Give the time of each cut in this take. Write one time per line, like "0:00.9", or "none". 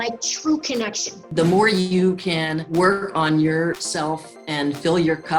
0:01.2
0:02.6
0:03.9

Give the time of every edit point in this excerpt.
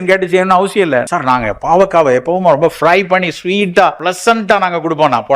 0:01.1
0:04.0

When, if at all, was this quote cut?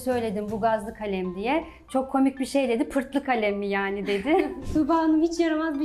0:04.6

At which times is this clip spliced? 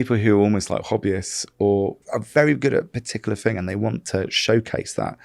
0:02.0

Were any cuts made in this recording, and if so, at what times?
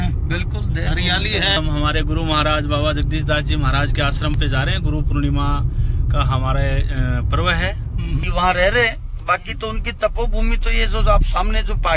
0:01.6
0:08.2

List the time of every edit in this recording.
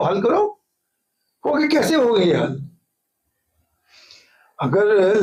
none

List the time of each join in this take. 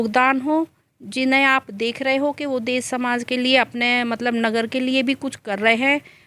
none

